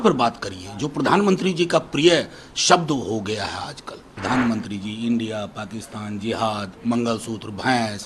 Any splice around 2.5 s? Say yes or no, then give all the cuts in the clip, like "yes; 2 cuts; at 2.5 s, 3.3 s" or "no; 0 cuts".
no; 1 cut; at 4.1 s